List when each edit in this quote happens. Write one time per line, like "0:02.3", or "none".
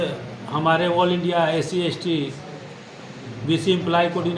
none